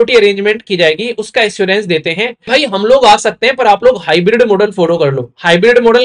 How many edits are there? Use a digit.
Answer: 1